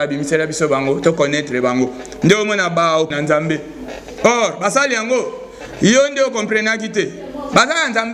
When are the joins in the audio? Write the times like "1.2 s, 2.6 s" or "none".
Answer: 3.1 s